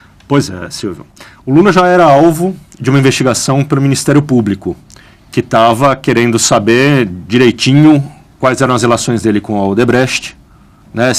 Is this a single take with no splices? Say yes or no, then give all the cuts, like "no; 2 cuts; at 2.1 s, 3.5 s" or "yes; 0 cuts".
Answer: no; 1 cut; at 3.7 s